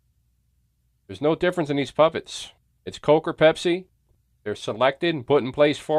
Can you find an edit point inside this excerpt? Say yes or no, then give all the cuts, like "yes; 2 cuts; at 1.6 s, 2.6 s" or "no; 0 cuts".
no; 0 cuts